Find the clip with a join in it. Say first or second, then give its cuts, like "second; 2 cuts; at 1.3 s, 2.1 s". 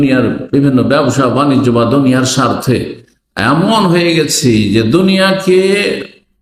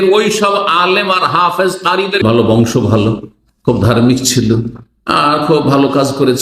second; 1 cut; at 2.2 s